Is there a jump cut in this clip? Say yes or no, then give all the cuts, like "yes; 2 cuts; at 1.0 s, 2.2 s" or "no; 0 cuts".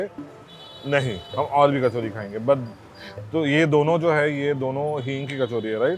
no; 0 cuts